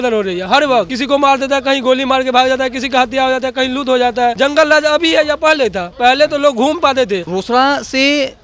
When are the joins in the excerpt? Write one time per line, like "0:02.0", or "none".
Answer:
0:00.9
0:04.3
0:07.3